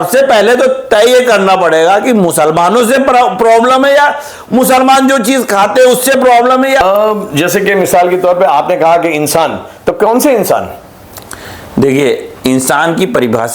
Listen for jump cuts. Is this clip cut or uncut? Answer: uncut